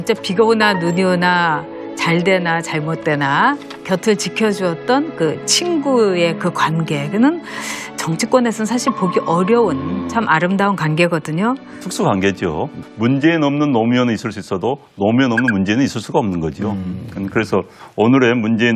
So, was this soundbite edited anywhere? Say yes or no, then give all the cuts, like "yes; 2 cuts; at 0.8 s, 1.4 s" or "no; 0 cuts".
yes; 1 cut; at 2.8 s